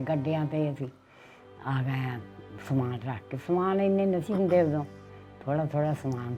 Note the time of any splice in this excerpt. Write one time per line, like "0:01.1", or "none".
none